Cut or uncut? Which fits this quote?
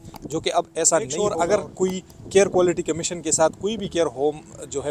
cut